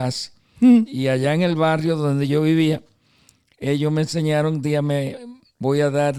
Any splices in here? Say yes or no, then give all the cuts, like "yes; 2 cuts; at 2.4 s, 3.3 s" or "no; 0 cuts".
no; 0 cuts